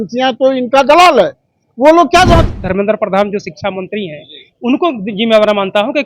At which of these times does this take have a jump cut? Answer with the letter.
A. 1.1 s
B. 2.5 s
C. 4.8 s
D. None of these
B